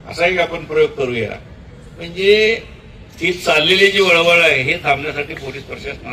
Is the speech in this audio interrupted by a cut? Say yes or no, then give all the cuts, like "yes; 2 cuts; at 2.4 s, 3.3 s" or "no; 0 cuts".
no; 0 cuts